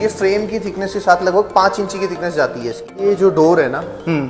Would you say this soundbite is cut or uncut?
cut